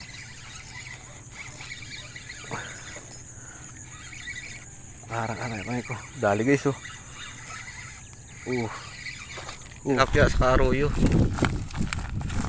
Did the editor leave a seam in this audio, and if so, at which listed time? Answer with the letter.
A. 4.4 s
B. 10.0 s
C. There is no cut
B